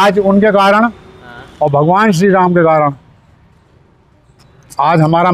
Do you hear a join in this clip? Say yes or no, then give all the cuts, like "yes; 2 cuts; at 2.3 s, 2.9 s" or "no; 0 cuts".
no; 0 cuts